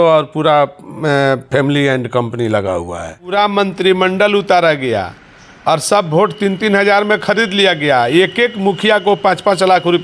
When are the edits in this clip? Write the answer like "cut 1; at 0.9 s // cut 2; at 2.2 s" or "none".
cut 1; at 3.3 s

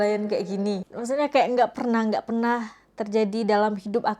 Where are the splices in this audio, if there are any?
cut 1; at 0.9 s

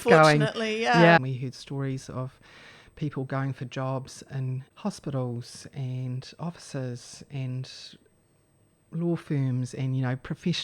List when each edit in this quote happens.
cut 1; at 1.2 s // cut 2; at 4.7 s

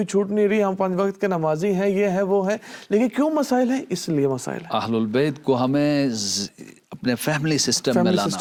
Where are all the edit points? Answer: none

